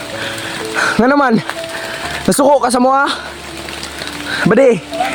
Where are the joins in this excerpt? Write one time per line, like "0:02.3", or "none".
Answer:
none